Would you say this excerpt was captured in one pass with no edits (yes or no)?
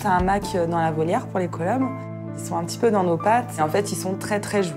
no